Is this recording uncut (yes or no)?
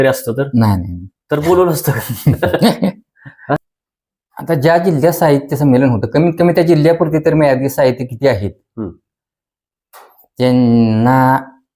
no